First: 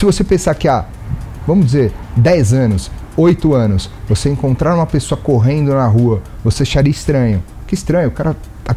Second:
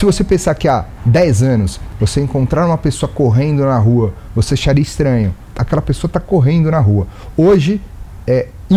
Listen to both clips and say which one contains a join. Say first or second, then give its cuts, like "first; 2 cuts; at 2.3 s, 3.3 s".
second; 3 cuts; at 1.0 s, 1.8 s, 5.4 s